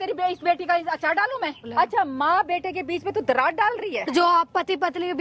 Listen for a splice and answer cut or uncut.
cut